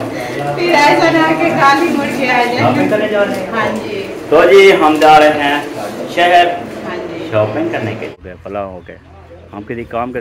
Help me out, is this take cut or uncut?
cut